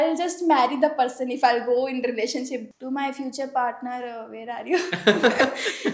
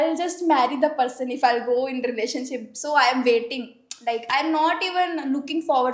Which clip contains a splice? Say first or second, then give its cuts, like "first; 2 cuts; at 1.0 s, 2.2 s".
first; 1 cut; at 2.7 s